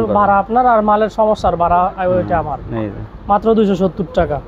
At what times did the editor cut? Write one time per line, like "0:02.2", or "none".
none